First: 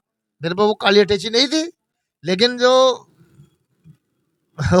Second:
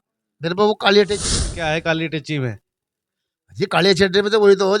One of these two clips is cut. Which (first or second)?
second